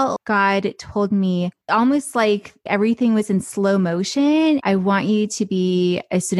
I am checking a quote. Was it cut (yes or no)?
yes